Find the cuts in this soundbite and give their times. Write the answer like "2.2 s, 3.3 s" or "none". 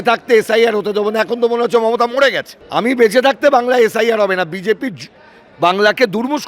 2.5 s